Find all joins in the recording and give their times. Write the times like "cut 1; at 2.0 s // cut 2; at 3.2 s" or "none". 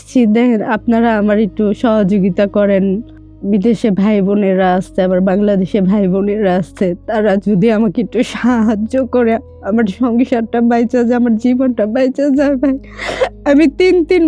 none